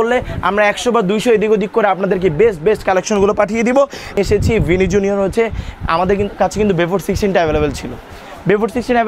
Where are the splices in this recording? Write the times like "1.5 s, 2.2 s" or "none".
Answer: 4.2 s

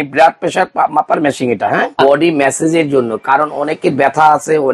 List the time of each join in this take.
2.0 s

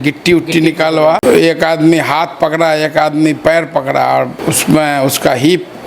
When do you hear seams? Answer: 1.2 s, 4.5 s

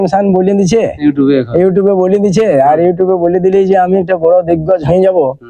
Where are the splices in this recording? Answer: none

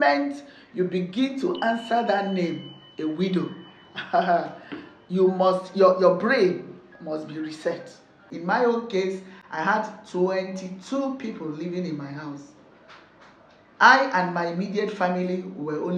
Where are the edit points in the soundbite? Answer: 8.3 s

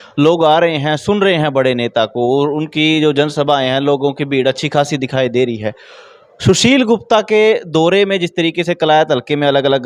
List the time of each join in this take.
none

